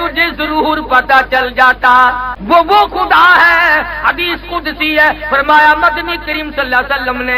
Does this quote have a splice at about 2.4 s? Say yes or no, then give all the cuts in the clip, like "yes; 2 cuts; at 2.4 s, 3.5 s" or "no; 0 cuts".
yes; 1 cut; at 2.4 s